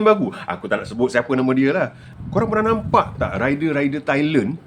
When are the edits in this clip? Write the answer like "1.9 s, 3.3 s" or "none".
2.0 s